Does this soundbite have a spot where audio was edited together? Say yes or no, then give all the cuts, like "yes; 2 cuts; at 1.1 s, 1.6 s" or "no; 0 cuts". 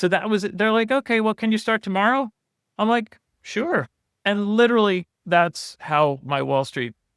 no; 0 cuts